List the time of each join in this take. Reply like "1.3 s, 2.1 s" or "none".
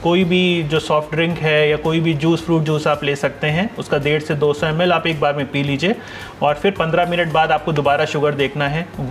none